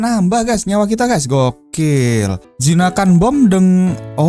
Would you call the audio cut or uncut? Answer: cut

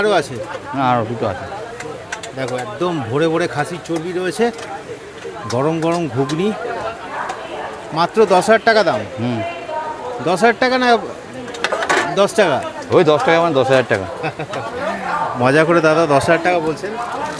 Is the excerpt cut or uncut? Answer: uncut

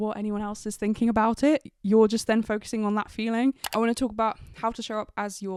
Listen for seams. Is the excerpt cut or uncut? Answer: uncut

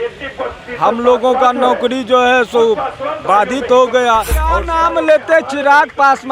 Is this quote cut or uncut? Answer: cut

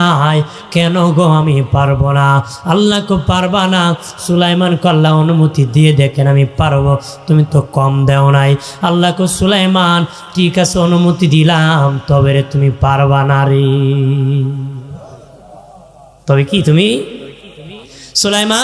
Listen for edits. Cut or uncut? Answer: uncut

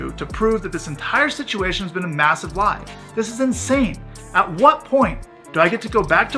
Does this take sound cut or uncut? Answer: uncut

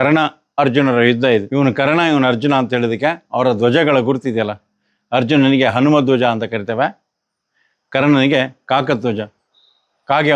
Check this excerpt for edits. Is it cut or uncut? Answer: cut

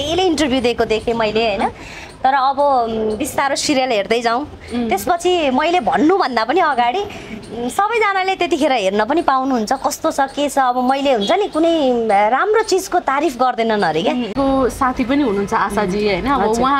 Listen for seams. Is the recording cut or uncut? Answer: cut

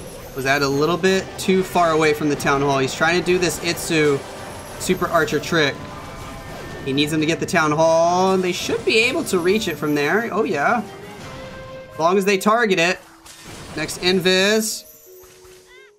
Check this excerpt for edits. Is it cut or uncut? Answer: uncut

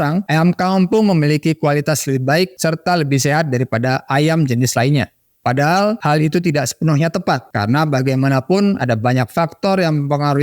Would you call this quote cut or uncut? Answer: uncut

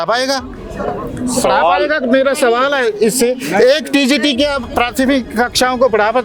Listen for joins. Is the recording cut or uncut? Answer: uncut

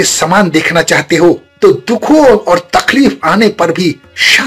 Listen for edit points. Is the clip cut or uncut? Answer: uncut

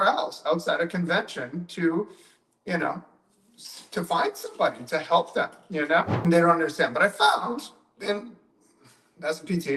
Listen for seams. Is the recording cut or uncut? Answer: cut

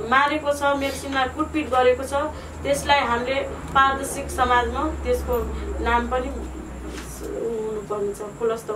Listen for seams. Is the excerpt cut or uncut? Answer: uncut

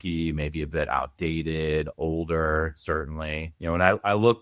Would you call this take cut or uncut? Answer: uncut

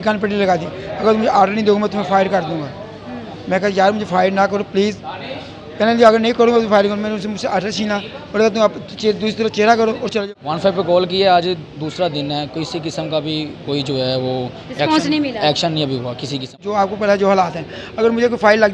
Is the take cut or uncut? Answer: cut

